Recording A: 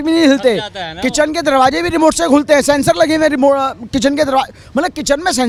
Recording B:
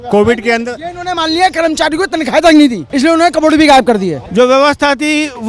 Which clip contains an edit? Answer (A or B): B